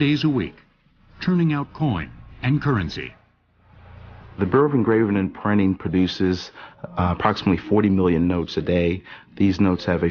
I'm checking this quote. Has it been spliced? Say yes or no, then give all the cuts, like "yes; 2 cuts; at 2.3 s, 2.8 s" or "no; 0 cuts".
yes; 1 cut; at 1.3 s